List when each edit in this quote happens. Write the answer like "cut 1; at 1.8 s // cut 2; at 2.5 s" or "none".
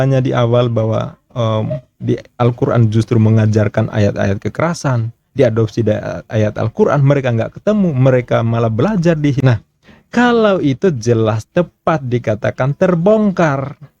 cut 1; at 9.4 s